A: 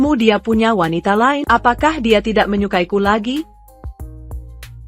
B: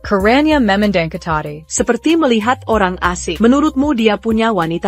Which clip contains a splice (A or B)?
A